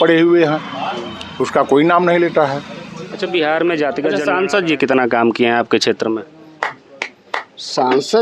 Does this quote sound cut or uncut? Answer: cut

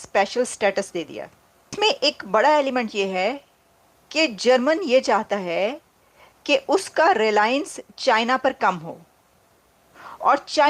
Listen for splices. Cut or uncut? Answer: cut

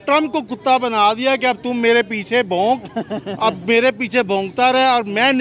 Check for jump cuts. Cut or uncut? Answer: uncut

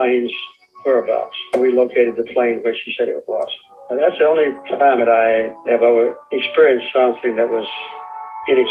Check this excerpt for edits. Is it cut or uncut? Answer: uncut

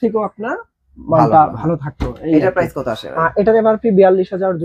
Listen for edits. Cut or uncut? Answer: uncut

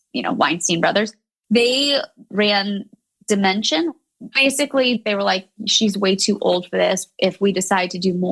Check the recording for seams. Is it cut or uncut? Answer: cut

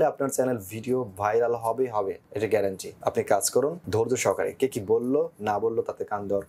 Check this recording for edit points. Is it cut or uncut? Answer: cut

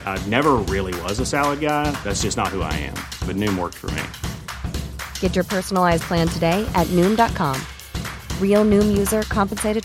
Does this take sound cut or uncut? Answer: uncut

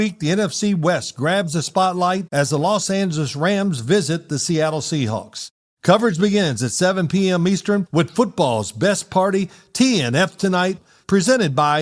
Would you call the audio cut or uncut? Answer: cut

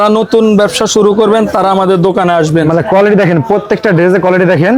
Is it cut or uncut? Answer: uncut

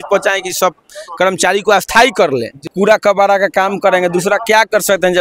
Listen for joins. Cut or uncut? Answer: cut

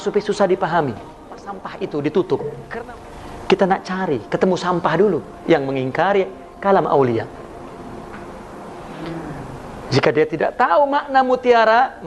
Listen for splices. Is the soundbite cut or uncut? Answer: cut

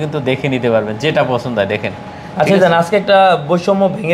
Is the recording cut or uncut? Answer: uncut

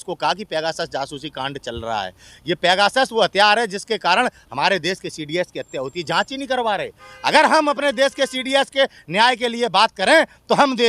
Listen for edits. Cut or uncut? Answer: uncut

